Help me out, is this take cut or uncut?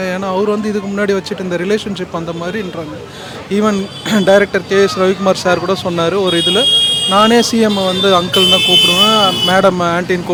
uncut